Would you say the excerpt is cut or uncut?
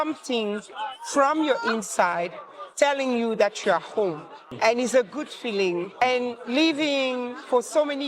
cut